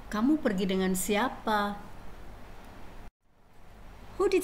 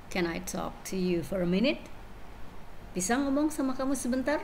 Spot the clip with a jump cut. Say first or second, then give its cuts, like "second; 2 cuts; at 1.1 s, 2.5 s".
first; 1 cut; at 1.5 s